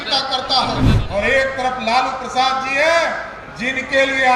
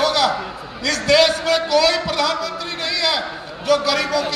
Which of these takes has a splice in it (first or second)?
first